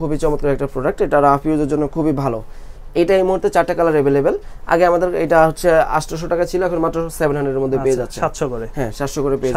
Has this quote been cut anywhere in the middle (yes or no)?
no